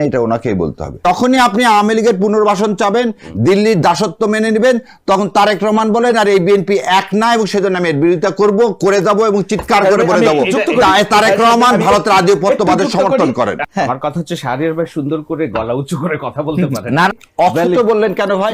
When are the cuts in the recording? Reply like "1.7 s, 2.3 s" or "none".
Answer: 1.0 s, 13.6 s, 17.1 s